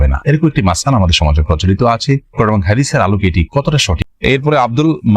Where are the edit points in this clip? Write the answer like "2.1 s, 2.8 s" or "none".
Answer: 4.0 s

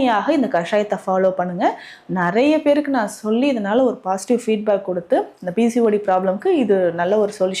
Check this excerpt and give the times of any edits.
none

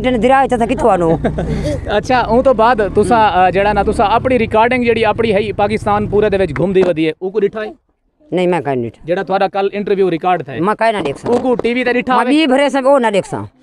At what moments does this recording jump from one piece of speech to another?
none

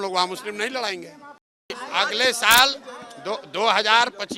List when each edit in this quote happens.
1.8 s

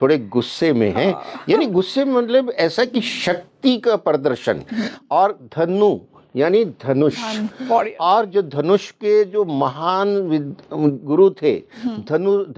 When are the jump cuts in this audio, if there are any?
none

